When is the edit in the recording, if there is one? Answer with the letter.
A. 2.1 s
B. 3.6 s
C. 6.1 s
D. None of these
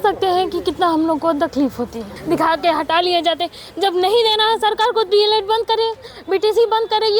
A